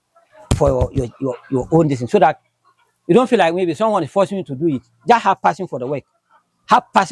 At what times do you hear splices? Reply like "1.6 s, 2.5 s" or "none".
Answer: none